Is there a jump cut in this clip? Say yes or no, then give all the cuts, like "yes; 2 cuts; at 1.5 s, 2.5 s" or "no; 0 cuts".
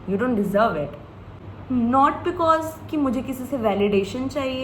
yes; 1 cut; at 1.3 s